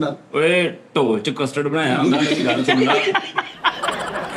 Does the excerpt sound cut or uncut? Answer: uncut